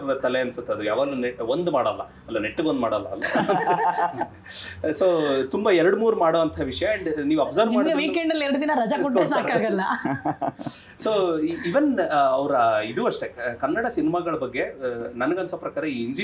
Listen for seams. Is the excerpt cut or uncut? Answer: uncut